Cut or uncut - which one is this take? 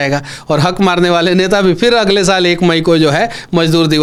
uncut